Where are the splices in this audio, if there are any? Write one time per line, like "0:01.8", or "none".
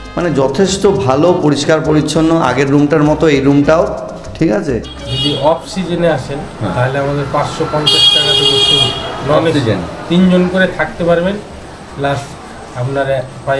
0:05.0